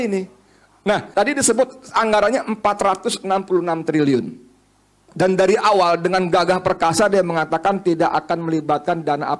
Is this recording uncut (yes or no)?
no